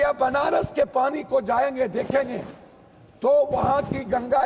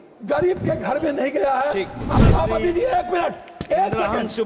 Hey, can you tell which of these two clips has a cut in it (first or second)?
second